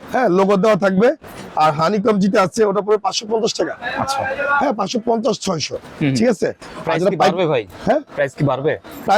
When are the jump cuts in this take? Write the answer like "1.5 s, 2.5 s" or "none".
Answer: none

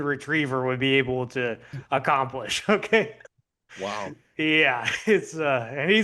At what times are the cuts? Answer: none

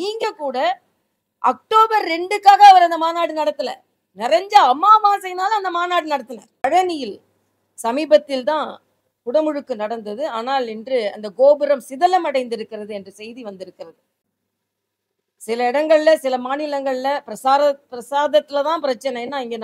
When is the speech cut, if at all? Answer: 6.6 s

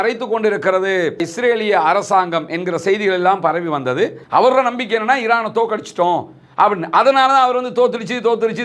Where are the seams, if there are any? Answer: 4.2 s

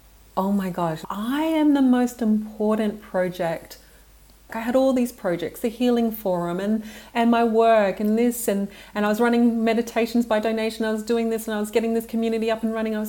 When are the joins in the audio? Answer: 1.0 s, 4.5 s

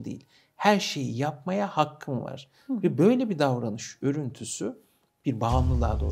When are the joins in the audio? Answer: none

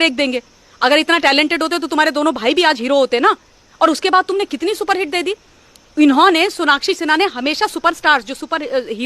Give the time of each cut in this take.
none

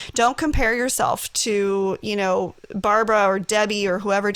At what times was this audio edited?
none

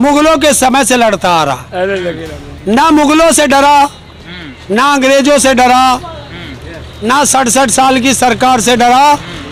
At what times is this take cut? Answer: none

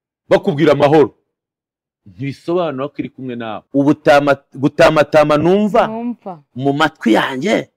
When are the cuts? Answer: 3.6 s

